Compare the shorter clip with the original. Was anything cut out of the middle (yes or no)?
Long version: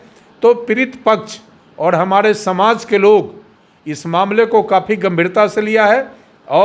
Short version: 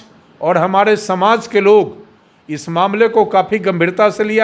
no